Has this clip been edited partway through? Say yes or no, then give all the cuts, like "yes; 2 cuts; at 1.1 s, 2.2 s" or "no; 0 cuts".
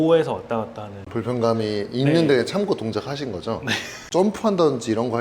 yes; 2 cuts; at 1.1 s, 4.1 s